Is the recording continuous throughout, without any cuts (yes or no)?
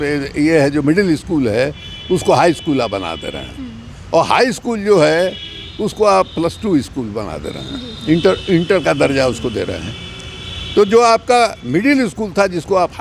yes